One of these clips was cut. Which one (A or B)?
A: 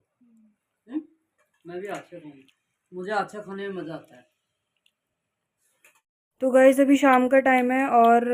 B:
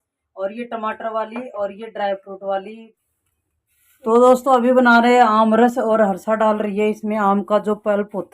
B